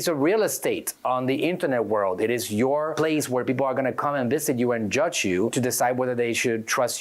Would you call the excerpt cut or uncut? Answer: cut